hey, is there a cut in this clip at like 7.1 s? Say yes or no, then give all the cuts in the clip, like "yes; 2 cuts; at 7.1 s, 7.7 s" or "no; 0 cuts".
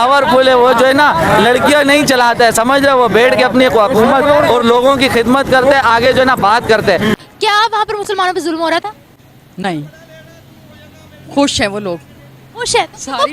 yes; 1 cut; at 7.1 s